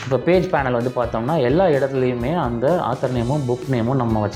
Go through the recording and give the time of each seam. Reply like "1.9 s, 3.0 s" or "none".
none